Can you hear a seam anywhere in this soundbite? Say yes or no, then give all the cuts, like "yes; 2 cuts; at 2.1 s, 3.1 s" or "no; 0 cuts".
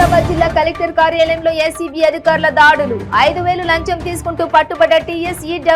no; 0 cuts